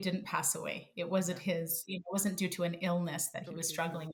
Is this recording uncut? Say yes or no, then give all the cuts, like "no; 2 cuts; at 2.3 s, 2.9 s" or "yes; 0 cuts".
yes; 0 cuts